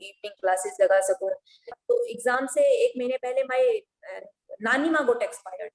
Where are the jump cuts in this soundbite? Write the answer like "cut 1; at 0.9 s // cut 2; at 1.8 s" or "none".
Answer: cut 1; at 1.8 s